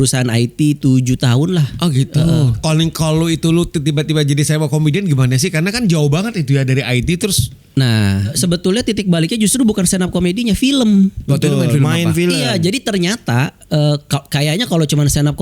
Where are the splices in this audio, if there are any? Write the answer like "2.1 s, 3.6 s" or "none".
2.6 s, 8.3 s, 11.2 s